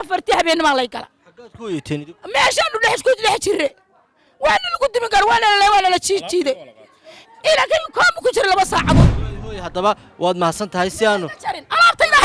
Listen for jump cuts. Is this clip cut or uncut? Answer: cut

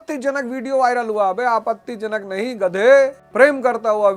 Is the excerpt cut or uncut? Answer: cut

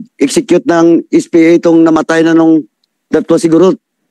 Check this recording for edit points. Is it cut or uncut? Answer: uncut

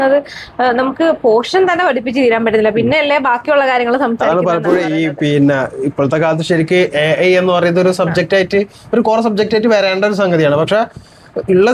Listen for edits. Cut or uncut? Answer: uncut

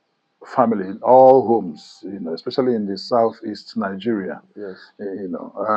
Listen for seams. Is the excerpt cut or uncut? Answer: uncut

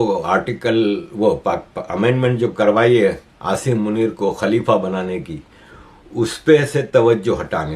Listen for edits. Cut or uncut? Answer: uncut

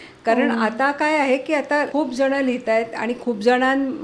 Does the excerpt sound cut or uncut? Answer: cut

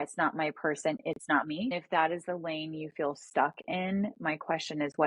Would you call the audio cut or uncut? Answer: cut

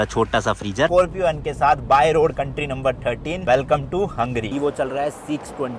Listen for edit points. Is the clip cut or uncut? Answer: cut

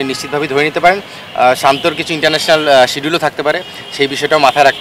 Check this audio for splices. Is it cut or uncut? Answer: uncut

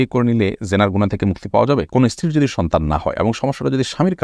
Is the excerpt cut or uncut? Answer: cut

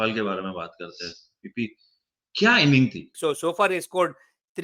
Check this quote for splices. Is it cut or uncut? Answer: cut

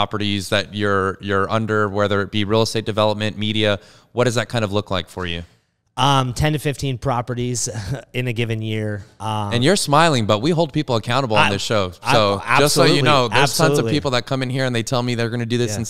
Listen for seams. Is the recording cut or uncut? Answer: uncut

